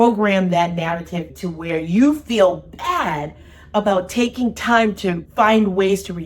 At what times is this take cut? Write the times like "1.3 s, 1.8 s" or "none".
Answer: 5.2 s